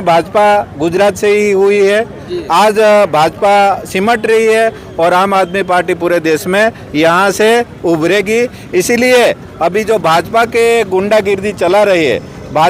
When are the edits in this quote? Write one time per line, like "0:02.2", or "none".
none